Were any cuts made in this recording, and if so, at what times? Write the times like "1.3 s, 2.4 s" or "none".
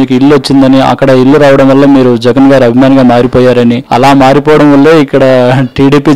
3.8 s